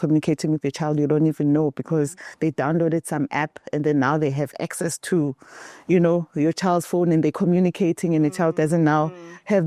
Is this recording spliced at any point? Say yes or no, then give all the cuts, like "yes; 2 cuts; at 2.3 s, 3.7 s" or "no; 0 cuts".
no; 0 cuts